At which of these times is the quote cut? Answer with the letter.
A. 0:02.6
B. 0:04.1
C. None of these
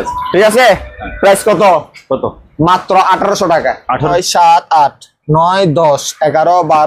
B